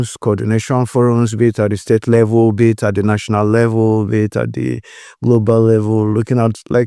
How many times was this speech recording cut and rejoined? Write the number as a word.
zero